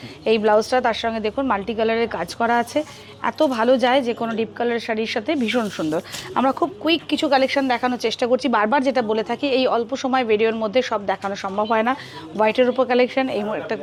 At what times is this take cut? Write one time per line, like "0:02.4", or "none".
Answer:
none